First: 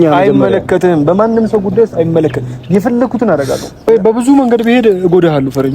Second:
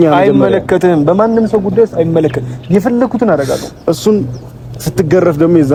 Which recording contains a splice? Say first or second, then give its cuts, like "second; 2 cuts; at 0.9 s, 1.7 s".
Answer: first; 1 cut; at 3.9 s